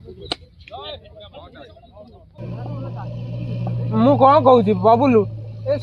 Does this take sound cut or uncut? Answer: uncut